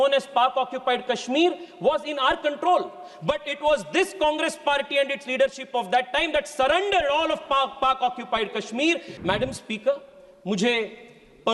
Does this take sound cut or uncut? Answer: cut